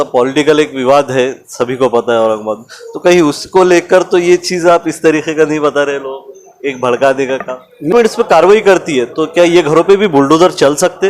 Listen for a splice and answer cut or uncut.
cut